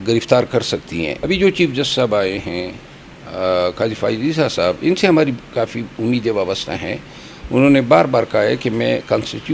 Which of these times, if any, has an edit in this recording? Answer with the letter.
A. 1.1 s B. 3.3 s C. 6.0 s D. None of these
A